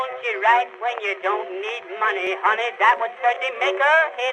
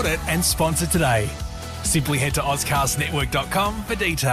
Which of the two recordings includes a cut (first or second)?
first